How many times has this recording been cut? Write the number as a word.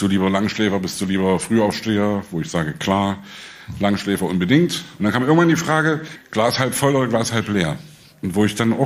two